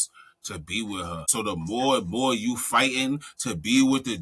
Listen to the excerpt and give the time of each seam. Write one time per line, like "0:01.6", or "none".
0:01.2